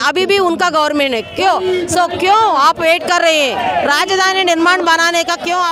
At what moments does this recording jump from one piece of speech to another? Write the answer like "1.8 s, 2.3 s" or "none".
none